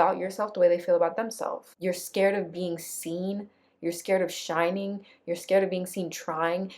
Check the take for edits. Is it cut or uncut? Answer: cut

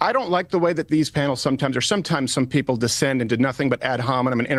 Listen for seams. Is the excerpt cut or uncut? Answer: uncut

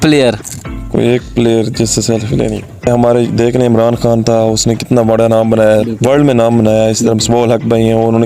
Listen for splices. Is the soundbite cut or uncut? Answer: cut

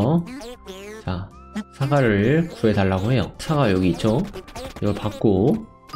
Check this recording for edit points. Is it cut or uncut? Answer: cut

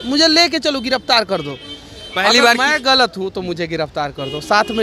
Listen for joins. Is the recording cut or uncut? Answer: uncut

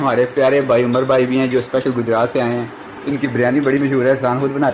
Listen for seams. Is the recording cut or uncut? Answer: uncut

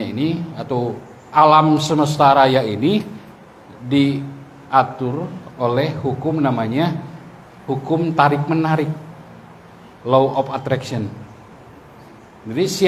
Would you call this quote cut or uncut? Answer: uncut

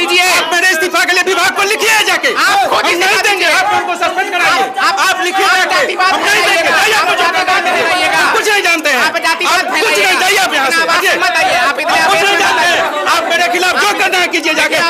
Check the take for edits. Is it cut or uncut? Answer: uncut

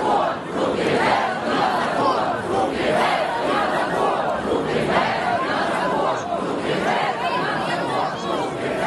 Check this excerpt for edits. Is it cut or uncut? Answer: uncut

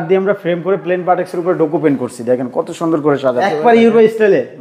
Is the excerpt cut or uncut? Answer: cut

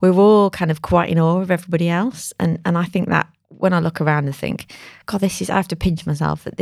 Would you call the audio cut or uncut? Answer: uncut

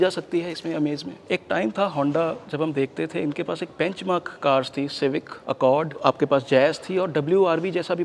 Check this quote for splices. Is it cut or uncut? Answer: cut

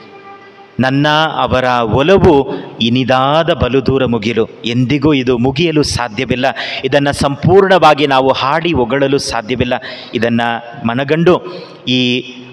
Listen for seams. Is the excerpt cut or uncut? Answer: uncut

